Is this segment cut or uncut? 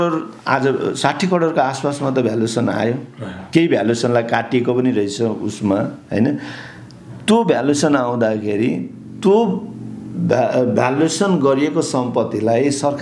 uncut